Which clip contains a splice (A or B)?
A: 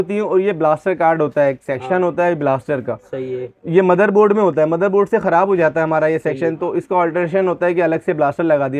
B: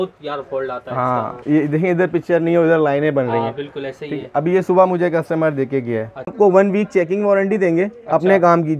B